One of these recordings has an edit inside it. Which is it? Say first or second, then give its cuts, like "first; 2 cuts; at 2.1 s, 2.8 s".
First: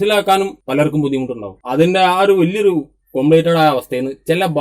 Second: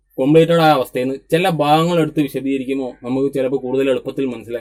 first; 1 cut; at 1.5 s